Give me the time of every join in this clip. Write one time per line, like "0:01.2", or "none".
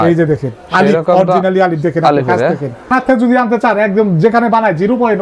0:02.9